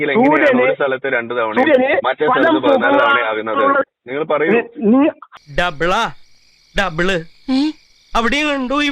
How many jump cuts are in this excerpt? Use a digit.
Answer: 1